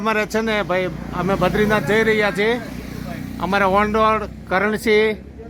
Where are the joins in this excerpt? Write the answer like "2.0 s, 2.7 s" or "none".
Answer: none